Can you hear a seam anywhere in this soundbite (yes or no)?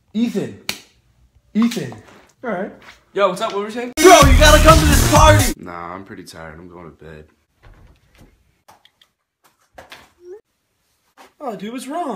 no